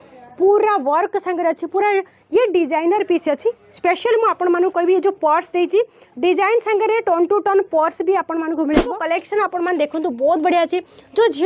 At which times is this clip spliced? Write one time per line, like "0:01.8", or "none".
0:08.9